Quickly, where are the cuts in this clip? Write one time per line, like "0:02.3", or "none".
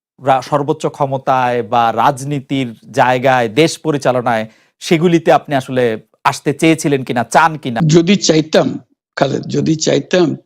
0:07.8